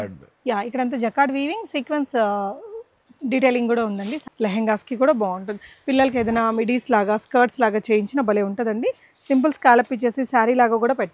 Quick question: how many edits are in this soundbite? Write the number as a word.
one